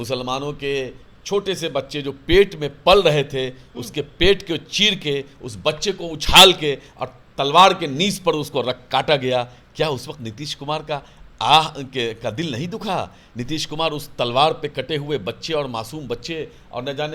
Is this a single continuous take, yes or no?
yes